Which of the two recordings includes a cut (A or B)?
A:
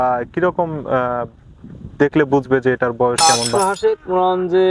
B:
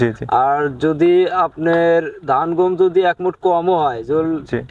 A